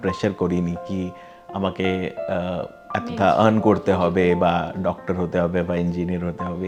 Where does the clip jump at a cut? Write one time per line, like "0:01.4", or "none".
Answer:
none